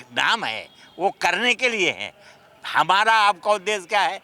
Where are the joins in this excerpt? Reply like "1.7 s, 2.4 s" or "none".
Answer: none